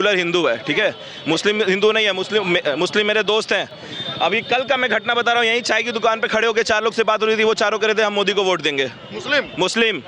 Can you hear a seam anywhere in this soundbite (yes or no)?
no